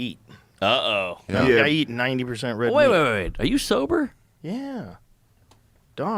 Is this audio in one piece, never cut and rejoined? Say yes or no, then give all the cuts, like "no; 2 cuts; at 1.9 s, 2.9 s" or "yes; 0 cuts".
yes; 0 cuts